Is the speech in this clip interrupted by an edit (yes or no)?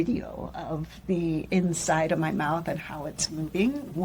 no